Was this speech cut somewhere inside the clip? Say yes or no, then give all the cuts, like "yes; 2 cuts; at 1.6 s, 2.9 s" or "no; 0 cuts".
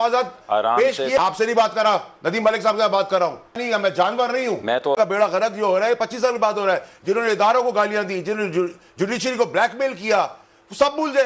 yes; 3 cuts; at 1.3 s, 3.6 s, 5.1 s